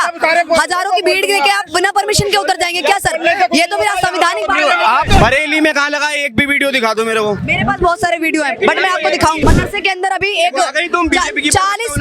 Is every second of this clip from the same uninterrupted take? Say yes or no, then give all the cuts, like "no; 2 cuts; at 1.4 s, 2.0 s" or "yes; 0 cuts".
no; 2 cuts; at 5.1 s, 9.4 s